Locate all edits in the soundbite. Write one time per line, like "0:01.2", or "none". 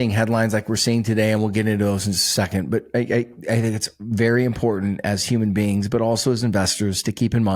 none